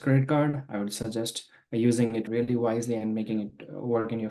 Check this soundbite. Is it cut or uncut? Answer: uncut